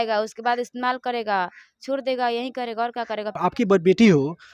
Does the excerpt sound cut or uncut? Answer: cut